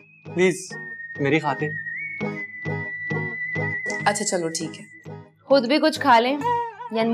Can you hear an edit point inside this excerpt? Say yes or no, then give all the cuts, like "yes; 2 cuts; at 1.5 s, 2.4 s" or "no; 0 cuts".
no; 0 cuts